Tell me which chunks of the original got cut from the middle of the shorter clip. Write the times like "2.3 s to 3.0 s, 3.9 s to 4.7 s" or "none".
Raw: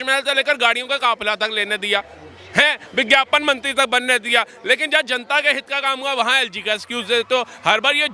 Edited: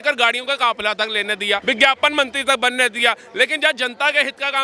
2.0 s to 2.9 s